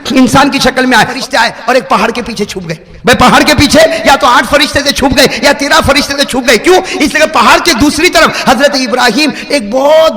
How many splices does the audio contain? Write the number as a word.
one